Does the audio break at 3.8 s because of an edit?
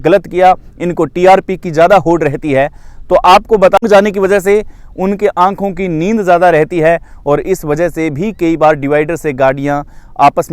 yes; 1 cut; at 3.8 s

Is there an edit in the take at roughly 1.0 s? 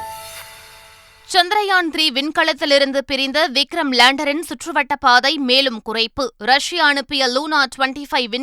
yes; 1 cut; at 1.0 s

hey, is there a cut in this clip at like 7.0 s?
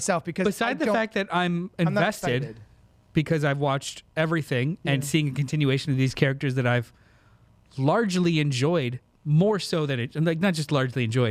no; 0 cuts

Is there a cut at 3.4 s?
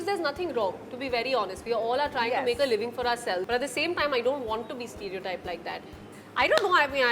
yes; 2 cuts; at 3.4 s, 6.1 s

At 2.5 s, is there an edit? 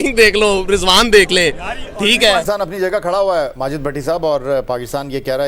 yes; 1 cut; at 2.5 s

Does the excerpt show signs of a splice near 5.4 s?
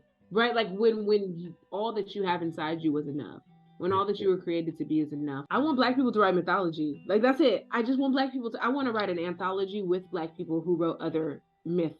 yes; 1 cut; at 5.4 s

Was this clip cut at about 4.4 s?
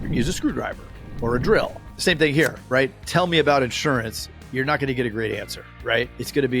no; 1 cut; at 3.0 s

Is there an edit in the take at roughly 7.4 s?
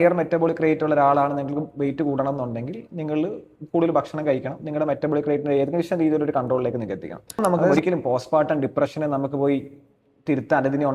yes; 1 cut; at 7.4 s

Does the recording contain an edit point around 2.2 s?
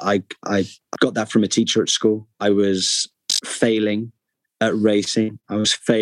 no; 0 cuts

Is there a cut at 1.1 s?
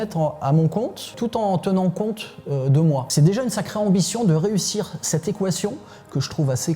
yes; 2 cuts; at 1.1 s, 3.1 s

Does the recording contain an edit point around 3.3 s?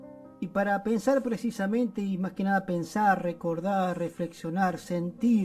yes; 1 cut; at 3.3 s

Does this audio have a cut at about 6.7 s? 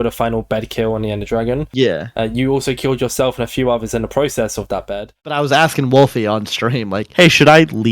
no; 1 cut; at 5.2 s

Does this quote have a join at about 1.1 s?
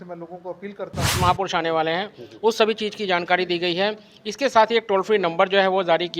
yes; 1 cut; at 1.1 s

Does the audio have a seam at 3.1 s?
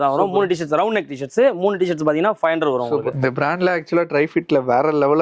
yes; 1 cut; at 3.1 s

